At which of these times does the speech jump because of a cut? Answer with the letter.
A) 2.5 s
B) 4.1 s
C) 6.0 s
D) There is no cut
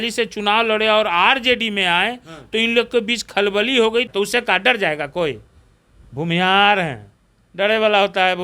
B